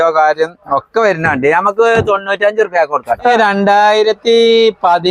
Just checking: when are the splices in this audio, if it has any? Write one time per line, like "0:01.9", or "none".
0:03.3